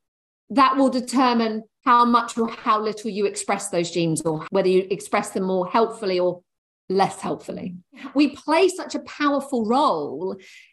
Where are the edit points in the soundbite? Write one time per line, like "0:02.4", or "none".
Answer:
0:01.7
0:04.4
0:08.1